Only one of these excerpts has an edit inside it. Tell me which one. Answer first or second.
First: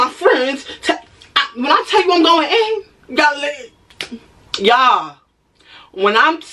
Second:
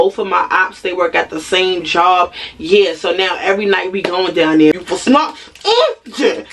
second